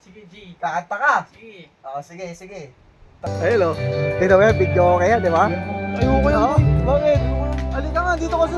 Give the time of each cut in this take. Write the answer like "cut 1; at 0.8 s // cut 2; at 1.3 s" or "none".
cut 1; at 3.3 s